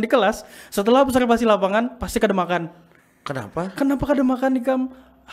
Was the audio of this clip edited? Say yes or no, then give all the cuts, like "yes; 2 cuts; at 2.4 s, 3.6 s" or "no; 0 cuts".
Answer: no; 0 cuts